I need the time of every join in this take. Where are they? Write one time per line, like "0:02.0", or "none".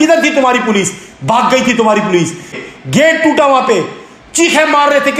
0:02.6